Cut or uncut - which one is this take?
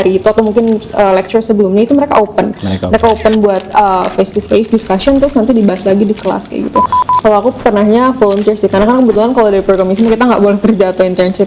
cut